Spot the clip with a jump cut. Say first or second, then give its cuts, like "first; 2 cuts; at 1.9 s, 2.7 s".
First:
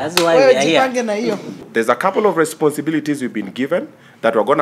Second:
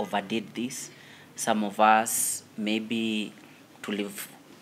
first; 1 cut; at 1.7 s